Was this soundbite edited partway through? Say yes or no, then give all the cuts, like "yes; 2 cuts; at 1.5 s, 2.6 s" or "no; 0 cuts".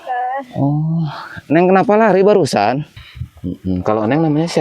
yes; 1 cut; at 2.9 s